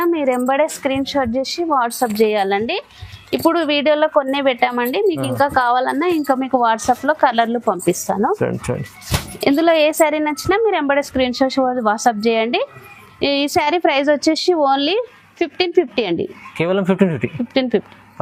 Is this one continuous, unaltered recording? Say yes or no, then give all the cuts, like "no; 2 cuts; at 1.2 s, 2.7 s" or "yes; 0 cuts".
yes; 0 cuts